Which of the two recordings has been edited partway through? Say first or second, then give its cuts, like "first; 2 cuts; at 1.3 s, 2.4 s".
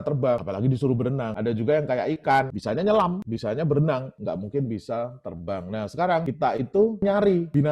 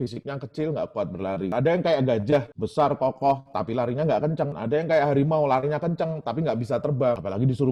first; 3 cuts; at 2.6 s, 3.3 s, 7.0 s